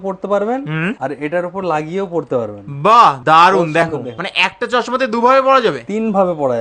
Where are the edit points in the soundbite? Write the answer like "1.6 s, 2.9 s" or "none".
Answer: none